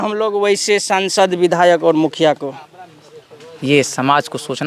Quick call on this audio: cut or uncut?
uncut